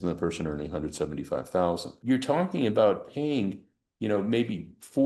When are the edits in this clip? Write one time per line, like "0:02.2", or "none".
0:01.9

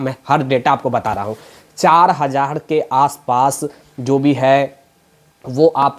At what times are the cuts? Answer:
none

